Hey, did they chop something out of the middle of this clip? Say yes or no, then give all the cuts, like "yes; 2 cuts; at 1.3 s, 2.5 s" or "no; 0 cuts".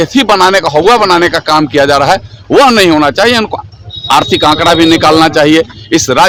no; 0 cuts